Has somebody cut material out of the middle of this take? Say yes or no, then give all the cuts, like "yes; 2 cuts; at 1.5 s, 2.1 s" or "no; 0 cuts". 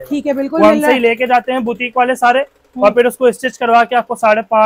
no; 0 cuts